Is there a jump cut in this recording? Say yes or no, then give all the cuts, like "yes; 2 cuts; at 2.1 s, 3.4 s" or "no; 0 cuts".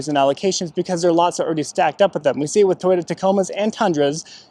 no; 0 cuts